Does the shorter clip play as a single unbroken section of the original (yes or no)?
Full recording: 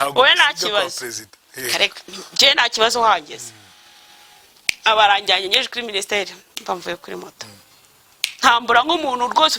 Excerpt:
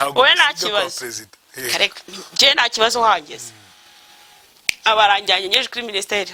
yes